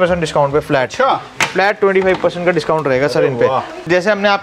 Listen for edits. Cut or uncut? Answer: uncut